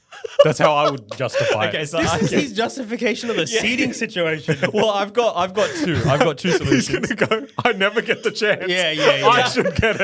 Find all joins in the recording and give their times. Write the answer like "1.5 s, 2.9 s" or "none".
none